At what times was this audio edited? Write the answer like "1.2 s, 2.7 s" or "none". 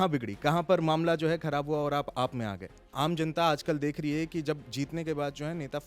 2.8 s